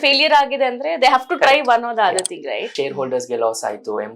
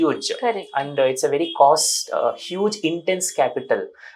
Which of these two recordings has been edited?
first; 1 cut; at 2.7 s

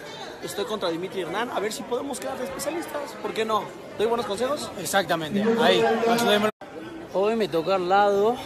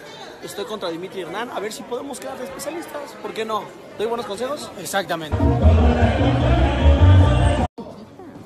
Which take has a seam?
first; 1 cut; at 5.3 s

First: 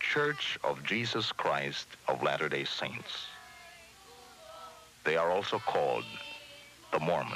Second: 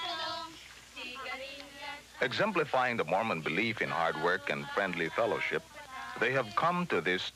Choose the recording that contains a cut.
first; 1 cut; at 1.8 s

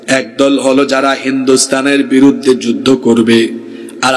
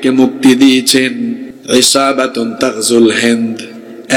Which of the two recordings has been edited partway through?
second; 1 cut; at 1.5 s

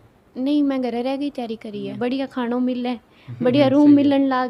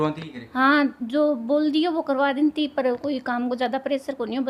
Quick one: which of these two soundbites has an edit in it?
first; 1 cut; at 1.9 s

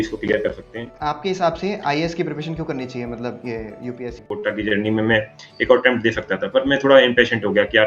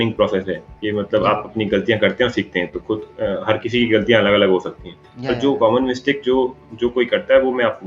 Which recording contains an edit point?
first; 2 cuts; at 0.9 s, 4.3 s

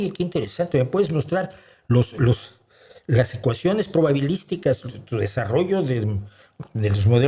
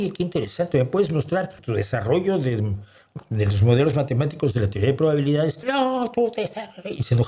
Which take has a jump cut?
second; 2 cuts; at 1.6 s, 5.6 s

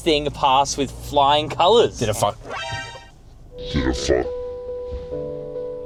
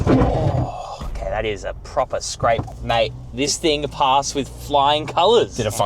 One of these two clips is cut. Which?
second; 1 cut; at 2.6 s

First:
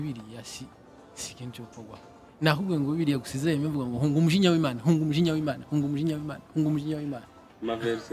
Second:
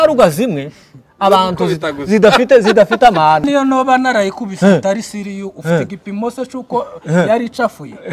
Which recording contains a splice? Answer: second; 1 cut; at 3.5 s

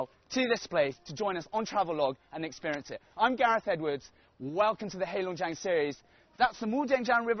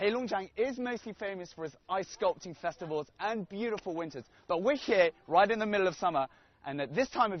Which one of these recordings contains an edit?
second; 1 cut; at 1.3 s

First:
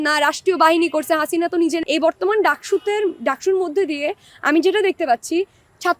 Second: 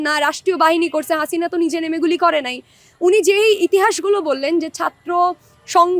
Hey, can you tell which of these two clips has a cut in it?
first; 1 cut; at 1.8 s

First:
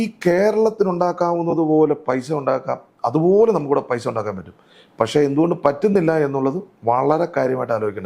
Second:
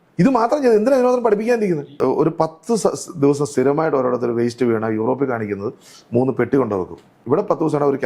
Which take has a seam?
second; 2 cuts; at 1.9 s, 7.1 s

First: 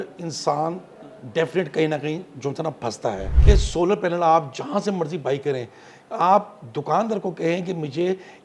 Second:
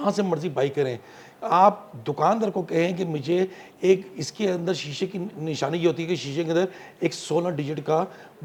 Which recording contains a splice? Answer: first; 1 cut; at 3.3 s

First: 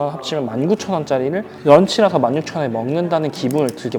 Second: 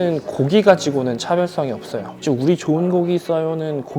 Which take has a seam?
second; 1 cut; at 2.1 s

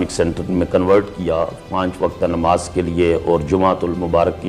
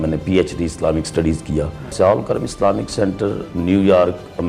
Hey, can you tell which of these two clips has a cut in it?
second; 1 cut; at 1.9 s

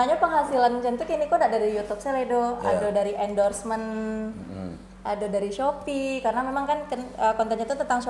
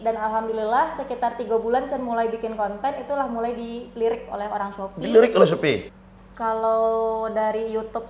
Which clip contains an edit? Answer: second; 1 cut; at 5.9 s

